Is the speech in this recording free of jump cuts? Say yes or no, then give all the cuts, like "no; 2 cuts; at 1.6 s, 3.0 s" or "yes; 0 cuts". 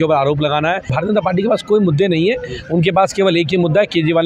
no; 1 cut; at 0.9 s